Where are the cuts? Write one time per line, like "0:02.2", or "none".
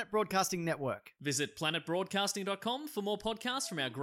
none